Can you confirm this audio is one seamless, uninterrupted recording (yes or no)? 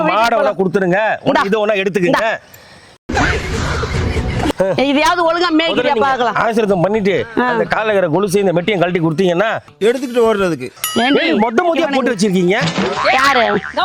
no